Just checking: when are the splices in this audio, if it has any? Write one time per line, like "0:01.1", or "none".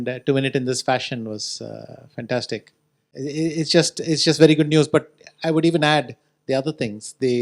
none